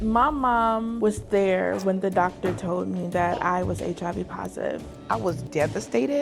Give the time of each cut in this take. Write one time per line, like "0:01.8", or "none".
0:00.9
0:04.9